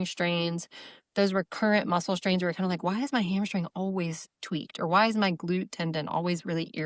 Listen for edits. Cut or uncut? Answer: uncut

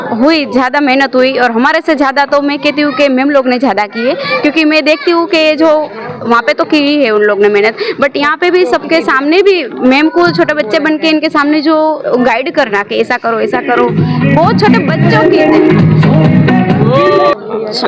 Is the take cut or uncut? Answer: uncut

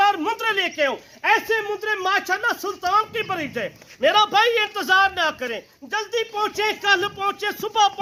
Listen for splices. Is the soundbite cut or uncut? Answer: uncut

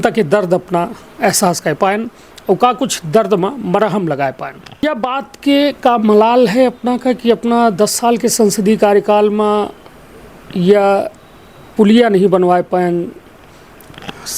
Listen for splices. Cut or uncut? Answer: cut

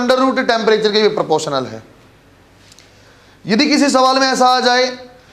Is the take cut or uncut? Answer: uncut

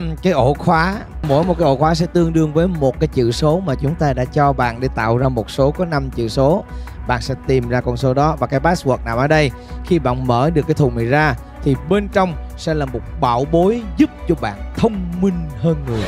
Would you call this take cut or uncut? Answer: cut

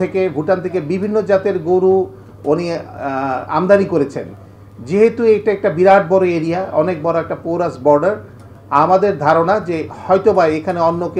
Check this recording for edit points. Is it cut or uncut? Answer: uncut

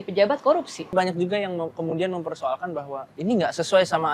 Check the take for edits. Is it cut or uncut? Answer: cut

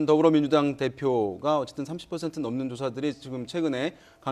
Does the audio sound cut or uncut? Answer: uncut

